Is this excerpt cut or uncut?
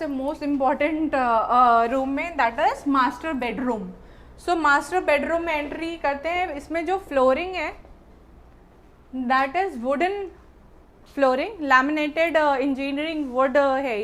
uncut